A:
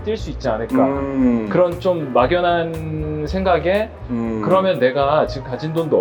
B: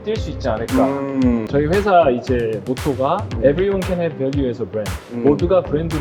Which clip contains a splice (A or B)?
B